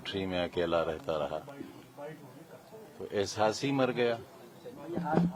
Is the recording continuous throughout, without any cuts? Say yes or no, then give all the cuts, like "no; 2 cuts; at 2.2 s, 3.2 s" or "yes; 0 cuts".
yes; 0 cuts